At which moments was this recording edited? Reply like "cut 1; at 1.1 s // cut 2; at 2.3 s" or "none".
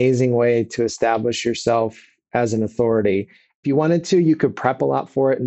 cut 1; at 3.6 s